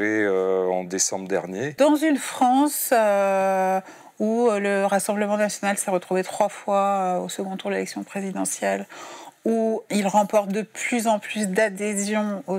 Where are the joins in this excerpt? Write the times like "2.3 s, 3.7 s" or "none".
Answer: 1.8 s, 9.8 s